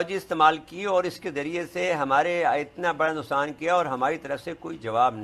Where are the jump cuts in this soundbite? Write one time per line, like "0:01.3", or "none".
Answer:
none